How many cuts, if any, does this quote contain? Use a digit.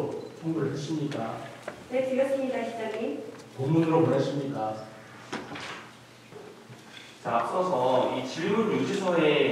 1